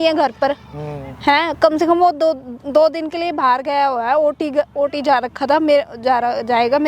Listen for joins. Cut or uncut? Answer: uncut